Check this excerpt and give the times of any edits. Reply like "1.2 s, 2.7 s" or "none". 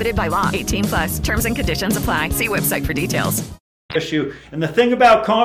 none